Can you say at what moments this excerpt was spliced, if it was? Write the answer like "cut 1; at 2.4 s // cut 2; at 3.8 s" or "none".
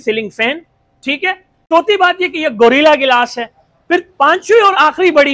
cut 1; at 1.5 s